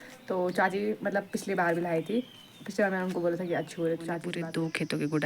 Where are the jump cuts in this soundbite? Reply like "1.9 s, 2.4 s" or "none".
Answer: 4.3 s